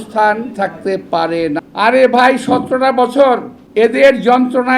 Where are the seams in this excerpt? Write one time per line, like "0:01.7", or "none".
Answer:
0:01.7
0:03.6